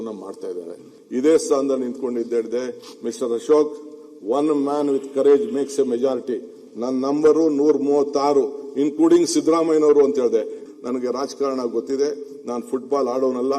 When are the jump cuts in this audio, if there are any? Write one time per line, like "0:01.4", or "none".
0:00.9
0:10.6